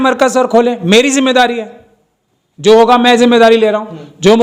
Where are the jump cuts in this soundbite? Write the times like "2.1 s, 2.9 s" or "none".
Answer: none